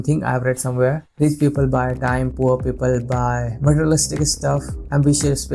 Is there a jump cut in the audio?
no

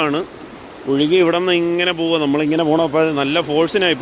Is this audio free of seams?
yes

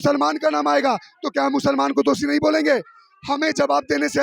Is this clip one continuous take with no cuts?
yes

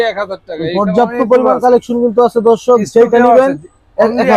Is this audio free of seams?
yes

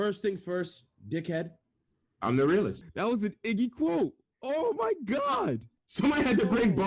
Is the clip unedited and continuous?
no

